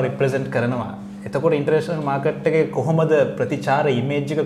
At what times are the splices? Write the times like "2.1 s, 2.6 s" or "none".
none